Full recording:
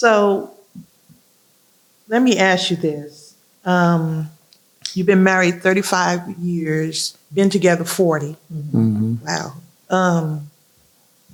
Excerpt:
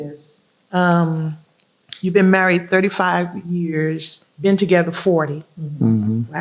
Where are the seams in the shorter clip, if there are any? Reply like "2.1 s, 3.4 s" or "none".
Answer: none